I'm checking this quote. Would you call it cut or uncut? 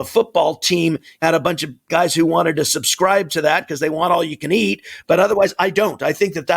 cut